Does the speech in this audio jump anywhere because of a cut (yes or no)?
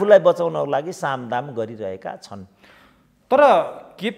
no